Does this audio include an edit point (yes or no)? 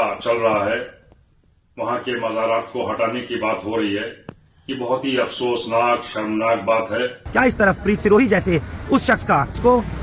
yes